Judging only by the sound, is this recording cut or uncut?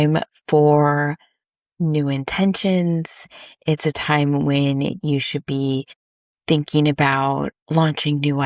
uncut